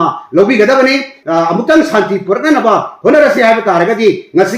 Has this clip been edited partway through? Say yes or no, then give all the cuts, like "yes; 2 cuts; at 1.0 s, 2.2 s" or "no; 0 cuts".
yes; 1 cut; at 1.2 s